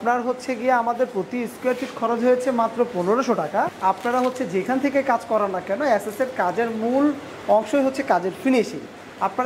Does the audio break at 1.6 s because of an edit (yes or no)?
no